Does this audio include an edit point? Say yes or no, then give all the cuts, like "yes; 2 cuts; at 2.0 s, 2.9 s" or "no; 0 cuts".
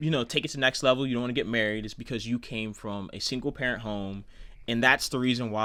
no; 0 cuts